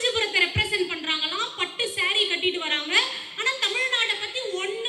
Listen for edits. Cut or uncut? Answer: uncut